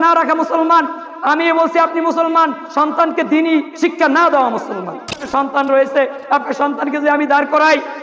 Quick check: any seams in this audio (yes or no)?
yes